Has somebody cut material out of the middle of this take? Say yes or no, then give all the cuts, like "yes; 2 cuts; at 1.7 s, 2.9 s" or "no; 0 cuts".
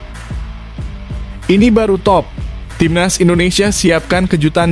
no; 0 cuts